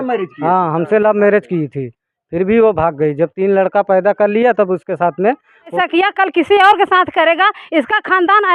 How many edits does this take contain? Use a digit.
1